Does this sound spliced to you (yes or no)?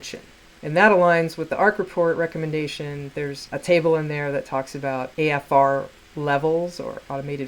yes